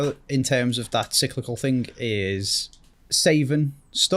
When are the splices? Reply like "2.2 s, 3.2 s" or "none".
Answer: none